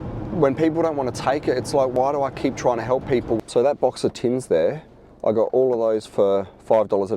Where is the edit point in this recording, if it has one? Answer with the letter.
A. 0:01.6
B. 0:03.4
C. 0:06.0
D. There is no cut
B